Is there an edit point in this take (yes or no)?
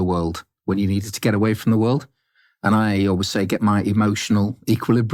no